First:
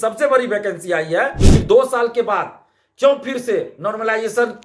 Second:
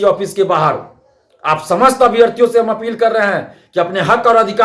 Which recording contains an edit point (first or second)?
first